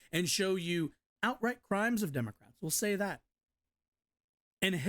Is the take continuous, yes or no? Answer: no